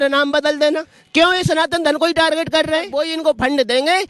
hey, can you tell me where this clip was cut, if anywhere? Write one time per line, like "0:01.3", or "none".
0:00.9
0:02.9